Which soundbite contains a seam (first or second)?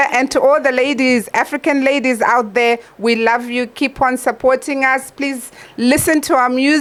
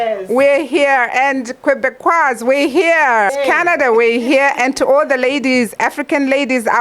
second